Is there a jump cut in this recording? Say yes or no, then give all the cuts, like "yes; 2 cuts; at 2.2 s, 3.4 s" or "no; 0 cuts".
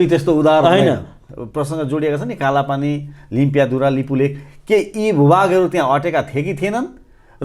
yes; 1 cut; at 1.2 s